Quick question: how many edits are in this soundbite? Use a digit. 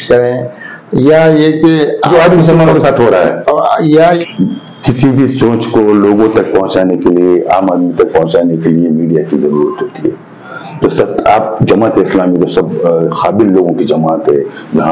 1